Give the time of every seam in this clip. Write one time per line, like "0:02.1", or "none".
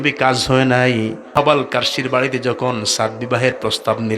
0:01.3